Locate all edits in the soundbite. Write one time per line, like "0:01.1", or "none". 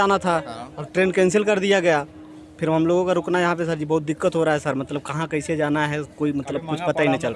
none